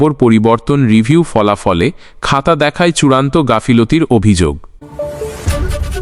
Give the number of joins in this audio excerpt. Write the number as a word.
one